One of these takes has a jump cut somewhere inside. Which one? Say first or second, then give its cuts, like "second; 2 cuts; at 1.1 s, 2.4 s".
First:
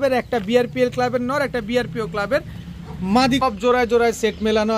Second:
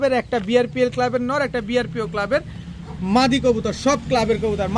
first; 1 cut; at 3.4 s